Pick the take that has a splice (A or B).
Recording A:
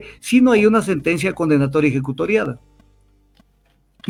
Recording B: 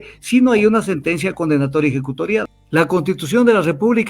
B